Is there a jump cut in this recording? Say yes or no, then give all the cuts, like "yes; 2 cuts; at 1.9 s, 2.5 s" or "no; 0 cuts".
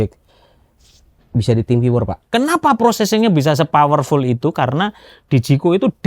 yes; 1 cut; at 2.2 s